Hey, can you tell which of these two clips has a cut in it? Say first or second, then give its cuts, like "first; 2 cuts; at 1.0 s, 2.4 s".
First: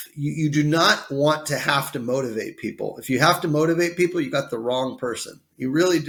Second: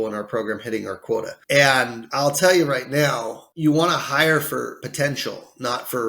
second; 4 cuts; at 1.4 s, 2.0 s, 3.4 s, 4.8 s